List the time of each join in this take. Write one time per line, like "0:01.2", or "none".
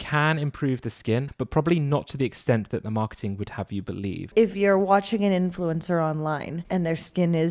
0:01.3
0:04.2
0:06.5